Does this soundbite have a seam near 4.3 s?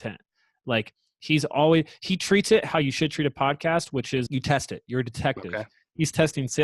yes; 1 cut; at 4.3 s

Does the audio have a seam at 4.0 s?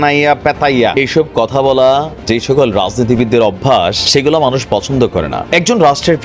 yes; 3 cuts; at 0.9 s, 4.0 s, 5.4 s

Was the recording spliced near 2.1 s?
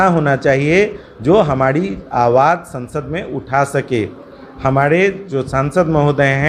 no; 0 cuts

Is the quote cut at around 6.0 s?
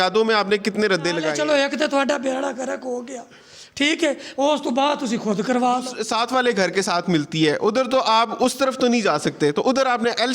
yes; 2 cuts; at 1.3 s, 6.0 s

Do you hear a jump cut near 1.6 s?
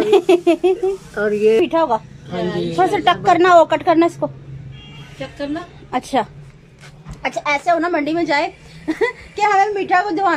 yes; 1 cut; at 1.6 s

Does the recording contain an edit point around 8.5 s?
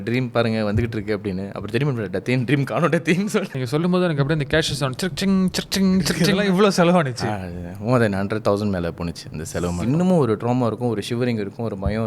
no; 4 cuts; at 3.6 s, 6.2 s, 7.2 s, 9.8 s

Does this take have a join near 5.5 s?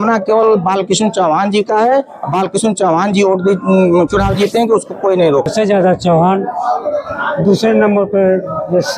yes; 1 cut; at 5.5 s

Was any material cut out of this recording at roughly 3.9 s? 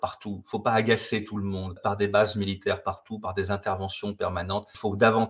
no; 1 cut; at 1.8 s

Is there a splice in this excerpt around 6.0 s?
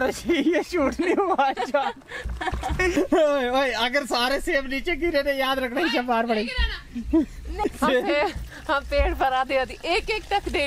no; 2 cuts; at 3.0 s, 7.6 s

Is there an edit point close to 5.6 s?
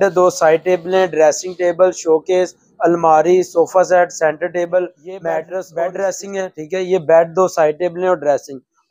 yes; 1 cut; at 5.6 s

